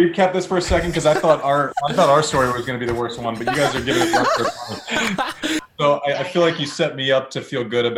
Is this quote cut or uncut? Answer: cut